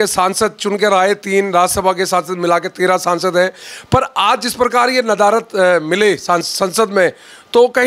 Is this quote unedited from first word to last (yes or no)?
yes